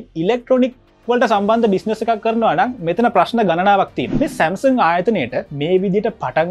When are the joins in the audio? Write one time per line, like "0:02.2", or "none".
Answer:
0:04.0